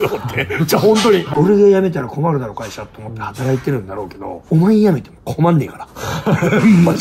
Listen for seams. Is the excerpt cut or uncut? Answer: cut